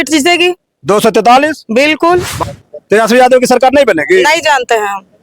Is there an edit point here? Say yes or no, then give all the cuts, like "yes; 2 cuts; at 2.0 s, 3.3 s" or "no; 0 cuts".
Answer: yes; 1 cut; at 2.3 s